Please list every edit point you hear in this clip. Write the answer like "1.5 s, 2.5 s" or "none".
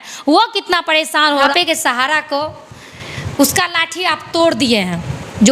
1.5 s